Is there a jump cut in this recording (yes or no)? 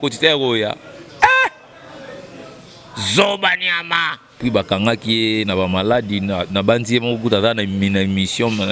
yes